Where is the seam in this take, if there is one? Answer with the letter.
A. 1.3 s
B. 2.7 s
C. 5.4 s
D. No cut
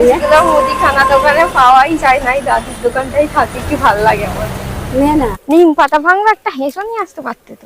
C